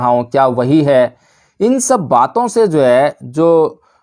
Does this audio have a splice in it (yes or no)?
no